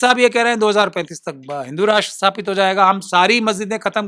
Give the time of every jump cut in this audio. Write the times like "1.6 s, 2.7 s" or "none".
none